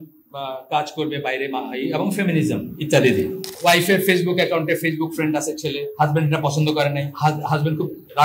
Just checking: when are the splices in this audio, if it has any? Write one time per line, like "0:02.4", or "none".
0:03.5
0:05.9
0:07.1